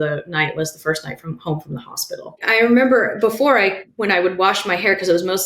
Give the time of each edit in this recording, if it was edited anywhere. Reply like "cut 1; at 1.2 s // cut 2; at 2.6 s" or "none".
cut 1; at 2.4 s // cut 2; at 3.9 s